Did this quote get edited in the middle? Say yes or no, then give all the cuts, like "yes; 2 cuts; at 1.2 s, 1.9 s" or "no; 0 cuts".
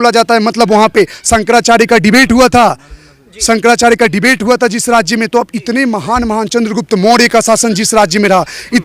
no; 0 cuts